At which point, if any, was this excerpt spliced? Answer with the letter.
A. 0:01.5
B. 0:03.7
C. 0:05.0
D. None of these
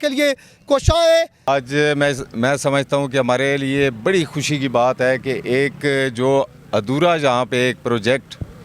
A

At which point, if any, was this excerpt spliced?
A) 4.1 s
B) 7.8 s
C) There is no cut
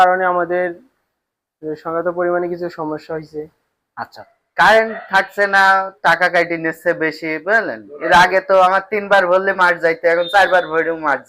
A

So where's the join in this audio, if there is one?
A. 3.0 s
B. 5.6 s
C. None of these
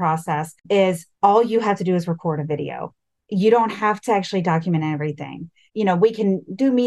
B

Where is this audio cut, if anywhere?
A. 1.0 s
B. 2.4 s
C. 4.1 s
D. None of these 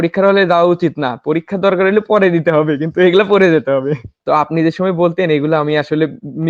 C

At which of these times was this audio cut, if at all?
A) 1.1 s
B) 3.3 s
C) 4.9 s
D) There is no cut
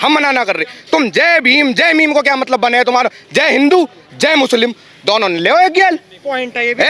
D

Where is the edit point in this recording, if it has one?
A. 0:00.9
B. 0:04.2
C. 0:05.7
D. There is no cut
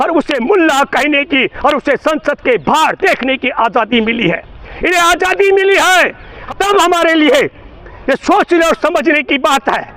D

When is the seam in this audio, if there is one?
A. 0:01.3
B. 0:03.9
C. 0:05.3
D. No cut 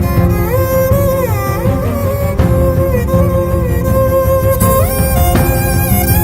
D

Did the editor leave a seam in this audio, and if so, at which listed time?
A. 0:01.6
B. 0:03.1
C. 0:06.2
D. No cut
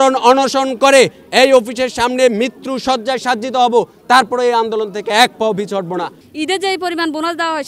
C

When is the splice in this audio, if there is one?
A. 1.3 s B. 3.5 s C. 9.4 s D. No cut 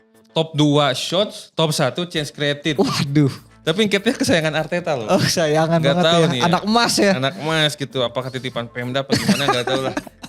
B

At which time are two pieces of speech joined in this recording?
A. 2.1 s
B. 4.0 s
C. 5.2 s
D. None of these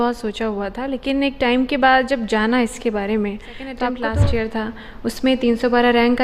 B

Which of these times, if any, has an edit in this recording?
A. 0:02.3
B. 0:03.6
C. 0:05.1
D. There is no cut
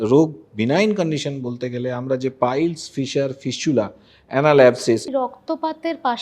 C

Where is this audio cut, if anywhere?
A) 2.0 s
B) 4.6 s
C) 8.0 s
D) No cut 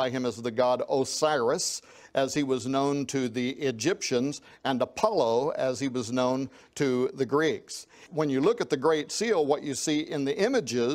C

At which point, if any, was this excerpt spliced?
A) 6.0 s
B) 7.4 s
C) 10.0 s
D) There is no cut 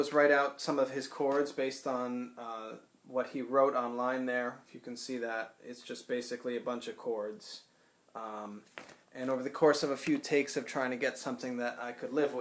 C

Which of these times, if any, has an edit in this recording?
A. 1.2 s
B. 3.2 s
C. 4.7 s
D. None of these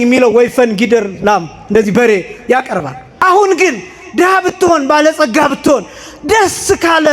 B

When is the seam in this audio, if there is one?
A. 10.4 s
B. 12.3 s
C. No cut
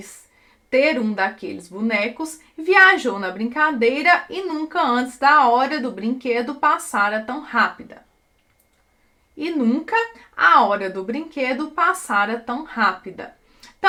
C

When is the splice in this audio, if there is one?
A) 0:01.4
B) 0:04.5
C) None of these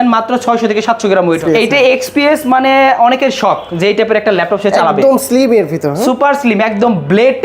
A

